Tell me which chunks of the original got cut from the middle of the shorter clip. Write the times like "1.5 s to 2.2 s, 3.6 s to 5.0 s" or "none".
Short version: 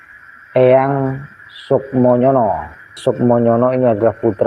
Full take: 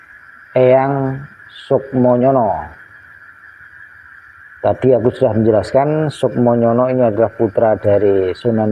3.0 s to 6.1 s